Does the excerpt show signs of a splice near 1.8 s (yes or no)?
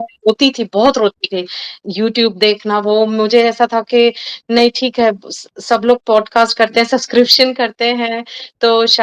yes